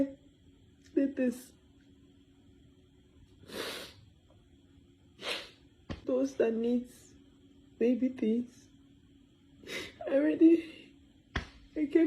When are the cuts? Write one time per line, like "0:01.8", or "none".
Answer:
0:06.0